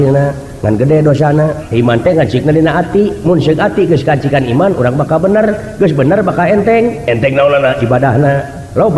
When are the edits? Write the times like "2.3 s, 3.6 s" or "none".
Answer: 1.6 s